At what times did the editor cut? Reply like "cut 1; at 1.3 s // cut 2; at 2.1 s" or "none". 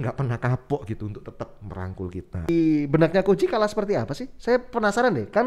cut 1; at 2.5 s